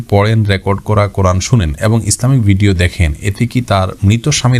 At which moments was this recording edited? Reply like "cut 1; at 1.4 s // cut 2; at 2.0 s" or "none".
none